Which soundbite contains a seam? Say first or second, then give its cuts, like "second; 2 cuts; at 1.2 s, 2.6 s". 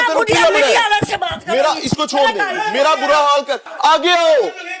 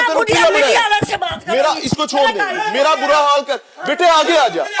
first; 1 cut; at 3.7 s